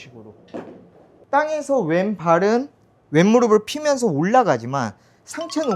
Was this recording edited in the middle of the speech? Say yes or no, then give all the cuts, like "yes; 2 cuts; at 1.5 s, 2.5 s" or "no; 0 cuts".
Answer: yes; 1 cut; at 1.2 s